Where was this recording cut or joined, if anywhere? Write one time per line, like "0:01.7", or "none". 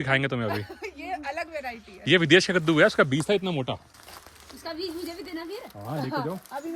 none